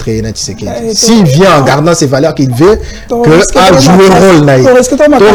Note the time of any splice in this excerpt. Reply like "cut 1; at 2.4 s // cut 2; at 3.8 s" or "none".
none

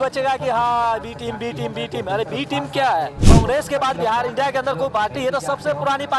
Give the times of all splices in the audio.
cut 1; at 3.2 s

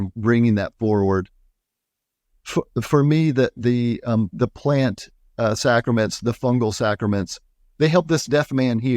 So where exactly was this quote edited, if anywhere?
none

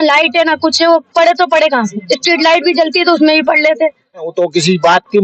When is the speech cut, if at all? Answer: cut 1; at 4.3 s

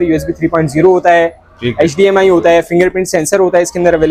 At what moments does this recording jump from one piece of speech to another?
none

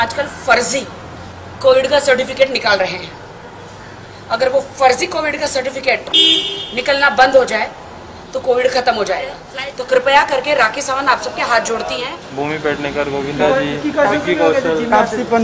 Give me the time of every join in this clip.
cut 1; at 9.4 s // cut 2; at 12.2 s

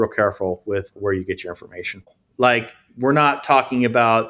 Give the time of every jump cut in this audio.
cut 1; at 1.0 s // cut 2; at 2.0 s

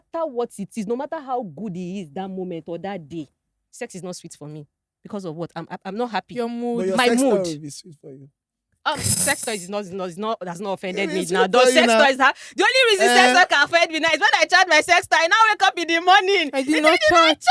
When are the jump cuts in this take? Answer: none

